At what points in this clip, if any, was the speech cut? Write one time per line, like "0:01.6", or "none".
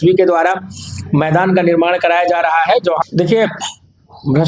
0:03.0